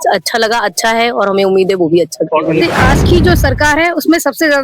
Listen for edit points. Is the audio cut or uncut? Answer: cut